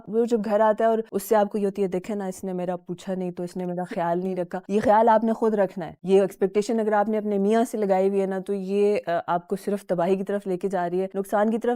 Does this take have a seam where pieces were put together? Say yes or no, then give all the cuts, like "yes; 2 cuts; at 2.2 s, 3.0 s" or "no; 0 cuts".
no; 0 cuts